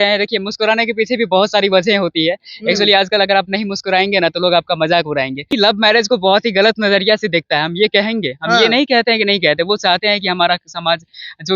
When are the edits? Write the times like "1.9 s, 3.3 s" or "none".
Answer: 5.5 s